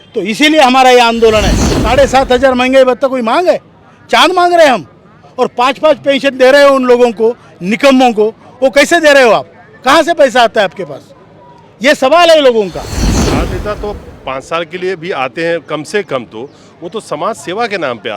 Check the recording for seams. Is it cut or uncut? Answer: cut